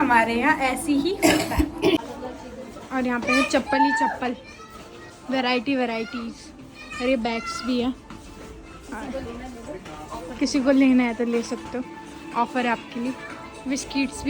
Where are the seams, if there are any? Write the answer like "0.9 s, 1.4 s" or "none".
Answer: none